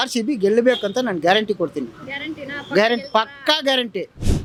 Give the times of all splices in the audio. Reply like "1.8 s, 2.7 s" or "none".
none